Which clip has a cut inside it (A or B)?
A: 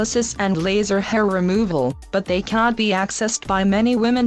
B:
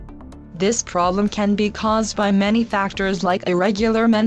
A